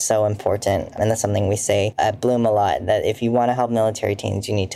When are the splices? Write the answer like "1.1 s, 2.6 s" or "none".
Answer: 1.9 s

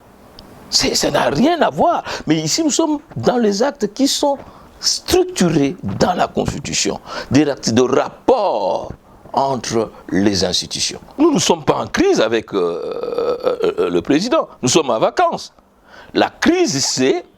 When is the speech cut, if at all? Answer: 11.2 s

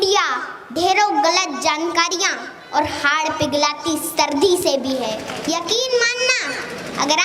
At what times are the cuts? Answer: 5.3 s

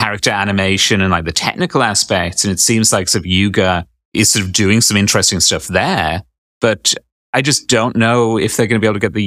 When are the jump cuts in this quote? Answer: 4.0 s

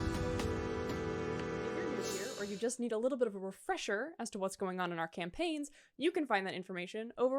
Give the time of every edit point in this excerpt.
2.0 s

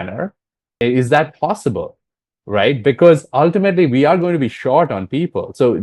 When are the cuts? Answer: none

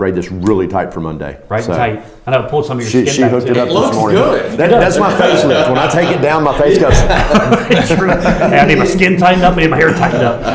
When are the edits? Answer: none

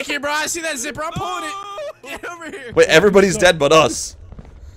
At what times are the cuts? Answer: 2.7 s

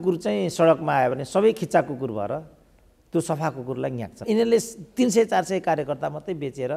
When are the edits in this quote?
4.2 s

